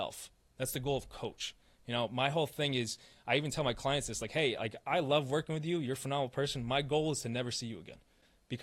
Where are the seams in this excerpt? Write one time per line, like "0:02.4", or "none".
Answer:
none